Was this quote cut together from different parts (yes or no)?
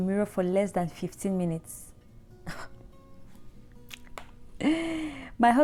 no